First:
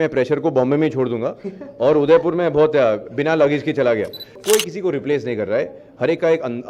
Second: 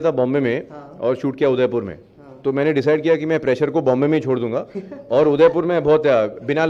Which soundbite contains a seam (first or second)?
first